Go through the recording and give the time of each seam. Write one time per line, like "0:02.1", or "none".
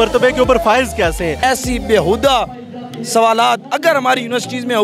0:01.4